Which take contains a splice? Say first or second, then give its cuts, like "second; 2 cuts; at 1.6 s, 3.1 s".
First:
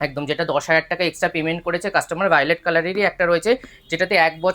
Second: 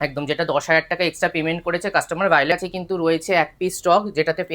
second; 1 cut; at 2.5 s